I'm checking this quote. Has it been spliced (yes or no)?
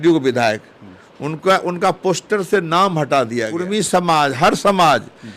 yes